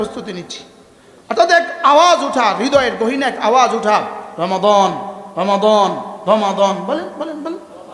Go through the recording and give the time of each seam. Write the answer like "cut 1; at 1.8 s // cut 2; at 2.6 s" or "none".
none